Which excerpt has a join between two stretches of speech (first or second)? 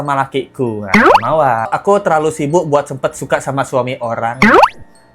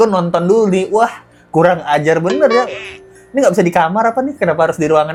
first